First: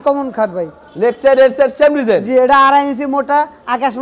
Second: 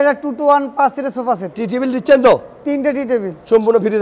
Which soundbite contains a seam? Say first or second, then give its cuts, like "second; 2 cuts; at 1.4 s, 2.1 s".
second; 1 cut; at 1.5 s